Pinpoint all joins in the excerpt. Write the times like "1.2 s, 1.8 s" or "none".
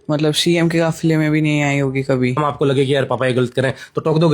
2.4 s